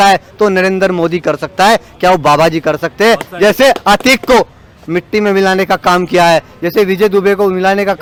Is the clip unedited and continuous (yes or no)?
yes